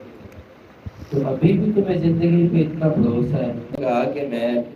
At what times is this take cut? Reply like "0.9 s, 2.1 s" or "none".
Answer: 3.8 s

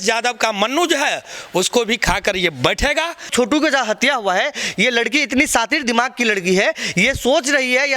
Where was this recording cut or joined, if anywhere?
3.3 s

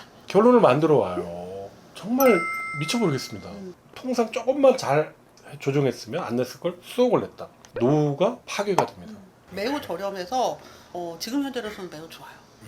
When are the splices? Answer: 3.6 s, 9.4 s

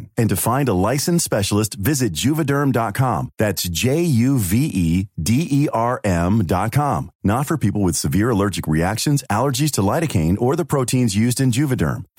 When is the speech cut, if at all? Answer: none

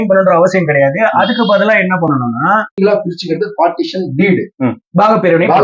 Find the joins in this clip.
2.8 s

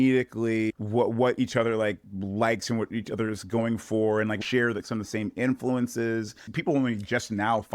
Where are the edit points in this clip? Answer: 4.4 s, 6.4 s

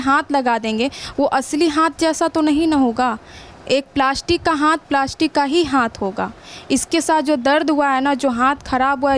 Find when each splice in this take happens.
none

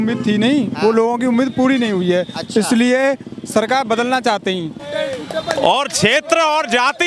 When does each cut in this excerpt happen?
4.8 s

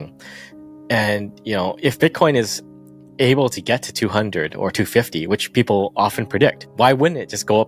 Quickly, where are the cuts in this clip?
6.6 s

